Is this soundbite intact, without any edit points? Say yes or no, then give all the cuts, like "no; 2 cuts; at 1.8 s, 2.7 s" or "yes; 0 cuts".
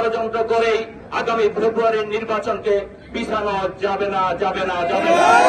yes; 0 cuts